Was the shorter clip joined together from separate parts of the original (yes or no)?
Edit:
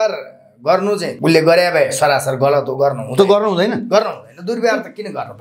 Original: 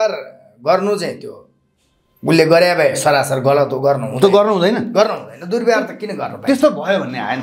yes